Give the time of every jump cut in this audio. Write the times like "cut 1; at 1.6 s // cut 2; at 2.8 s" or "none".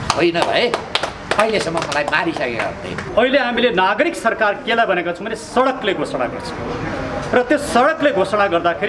cut 1; at 3.0 s